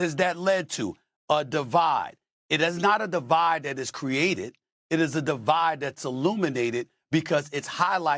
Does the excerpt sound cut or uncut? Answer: uncut